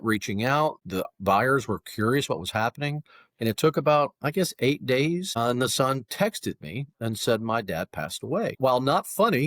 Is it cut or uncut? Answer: cut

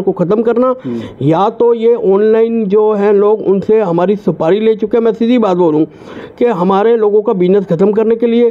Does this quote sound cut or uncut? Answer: uncut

